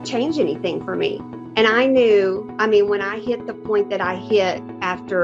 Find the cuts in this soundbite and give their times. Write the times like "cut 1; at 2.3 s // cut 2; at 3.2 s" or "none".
none